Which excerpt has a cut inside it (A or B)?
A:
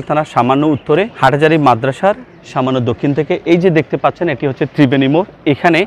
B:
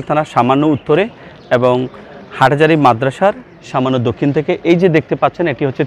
A